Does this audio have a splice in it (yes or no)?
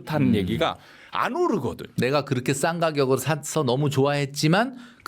yes